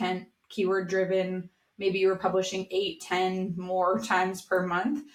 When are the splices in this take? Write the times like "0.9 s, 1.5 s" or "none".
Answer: none

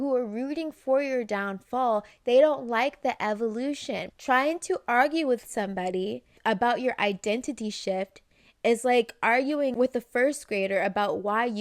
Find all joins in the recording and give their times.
4.1 s, 6.4 s, 9.7 s

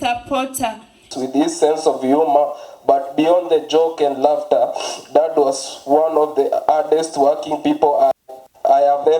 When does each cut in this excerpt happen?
1.1 s

